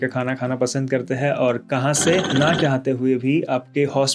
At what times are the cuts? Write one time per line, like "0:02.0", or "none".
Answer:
0:02.3